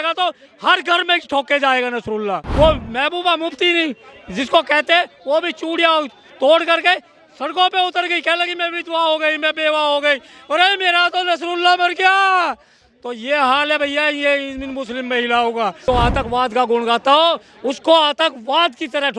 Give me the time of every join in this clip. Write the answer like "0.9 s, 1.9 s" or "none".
2.4 s, 15.8 s